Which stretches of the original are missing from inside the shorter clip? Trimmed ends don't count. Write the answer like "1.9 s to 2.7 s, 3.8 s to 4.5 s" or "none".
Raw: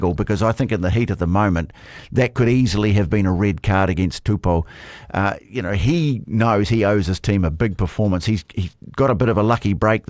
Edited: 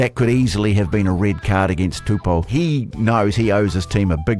4.7 s to 5.8 s